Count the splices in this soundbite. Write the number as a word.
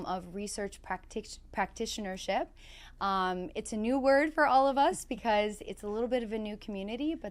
zero